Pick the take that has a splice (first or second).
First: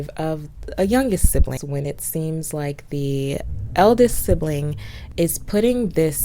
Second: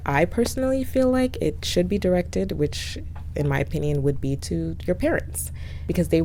first